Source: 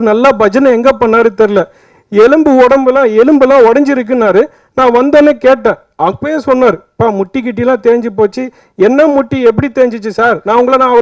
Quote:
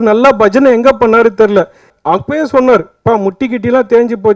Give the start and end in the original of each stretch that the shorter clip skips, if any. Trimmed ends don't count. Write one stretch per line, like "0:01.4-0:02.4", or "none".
0:01.9-0:05.9